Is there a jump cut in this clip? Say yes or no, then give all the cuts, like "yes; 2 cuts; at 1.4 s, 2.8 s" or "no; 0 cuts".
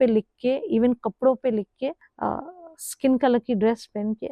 yes; 1 cut; at 2.1 s